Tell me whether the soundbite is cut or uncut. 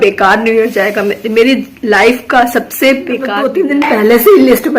cut